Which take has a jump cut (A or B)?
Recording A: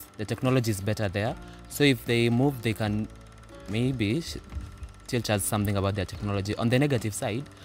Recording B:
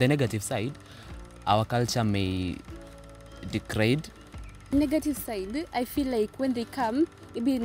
B